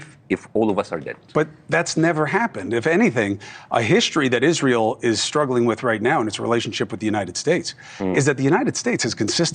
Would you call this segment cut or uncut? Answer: uncut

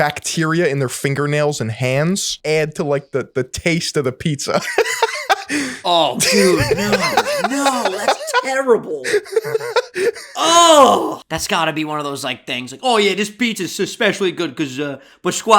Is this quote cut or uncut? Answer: cut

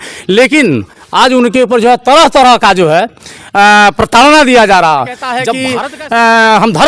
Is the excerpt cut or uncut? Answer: cut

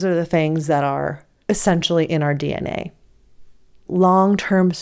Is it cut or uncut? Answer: cut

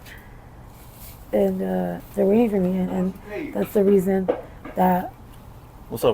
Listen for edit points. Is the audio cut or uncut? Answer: cut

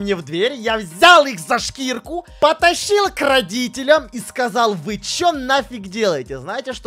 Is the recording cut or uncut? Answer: uncut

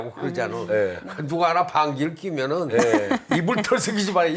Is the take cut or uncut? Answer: uncut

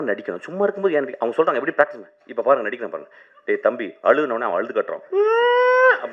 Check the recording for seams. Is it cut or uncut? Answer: uncut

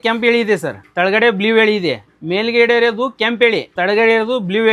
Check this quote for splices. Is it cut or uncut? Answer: uncut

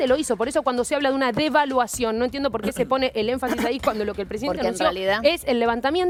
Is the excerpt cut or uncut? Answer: uncut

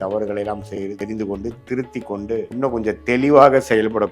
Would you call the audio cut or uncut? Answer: cut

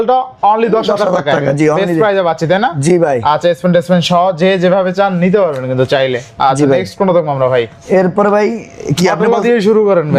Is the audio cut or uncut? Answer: uncut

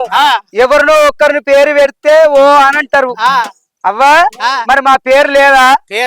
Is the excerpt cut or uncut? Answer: uncut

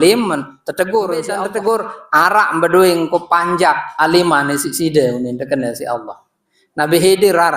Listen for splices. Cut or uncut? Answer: cut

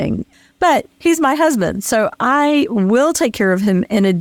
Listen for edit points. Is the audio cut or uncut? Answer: uncut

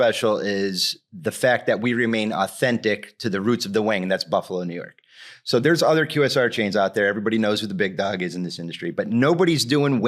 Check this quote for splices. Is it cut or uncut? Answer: uncut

